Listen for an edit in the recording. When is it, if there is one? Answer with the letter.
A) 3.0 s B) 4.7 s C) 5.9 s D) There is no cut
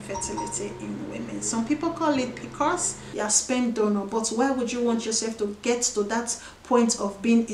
A